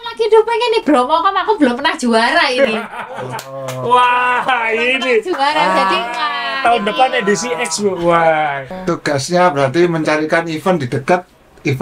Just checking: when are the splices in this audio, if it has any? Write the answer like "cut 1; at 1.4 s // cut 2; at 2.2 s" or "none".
cut 1; at 8.7 s